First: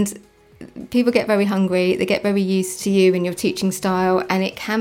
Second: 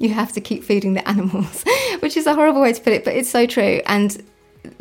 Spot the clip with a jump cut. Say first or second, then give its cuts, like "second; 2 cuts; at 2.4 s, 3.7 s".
first; 1 cut; at 2.8 s